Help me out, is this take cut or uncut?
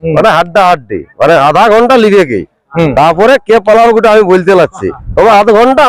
uncut